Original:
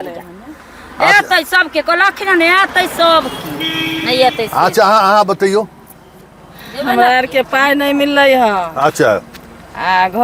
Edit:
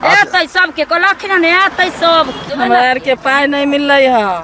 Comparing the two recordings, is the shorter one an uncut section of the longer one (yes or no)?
no